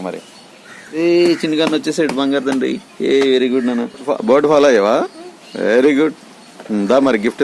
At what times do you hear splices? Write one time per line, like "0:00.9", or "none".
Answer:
0:00.9
0:04.1